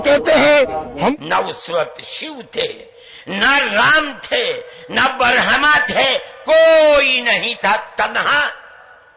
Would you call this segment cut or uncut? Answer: cut